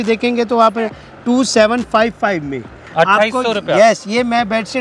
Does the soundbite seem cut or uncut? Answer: uncut